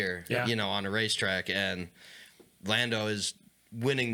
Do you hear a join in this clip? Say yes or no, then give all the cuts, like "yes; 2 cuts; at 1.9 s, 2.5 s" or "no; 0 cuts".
no; 0 cuts